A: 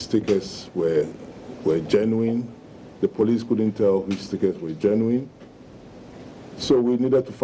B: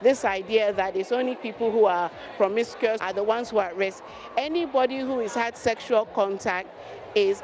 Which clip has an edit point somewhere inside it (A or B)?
B